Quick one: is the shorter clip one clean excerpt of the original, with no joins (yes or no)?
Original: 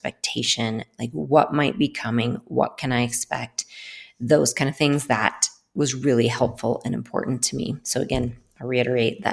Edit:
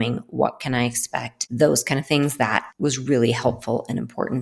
no